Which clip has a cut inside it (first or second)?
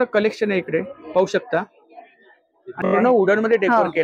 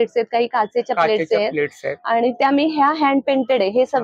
first